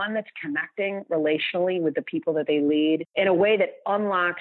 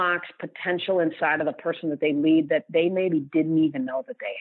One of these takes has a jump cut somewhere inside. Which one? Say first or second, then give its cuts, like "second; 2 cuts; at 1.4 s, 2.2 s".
first; 1 cut; at 3.1 s